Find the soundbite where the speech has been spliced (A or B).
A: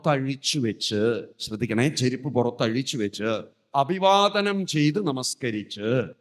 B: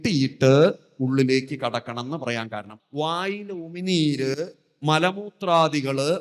B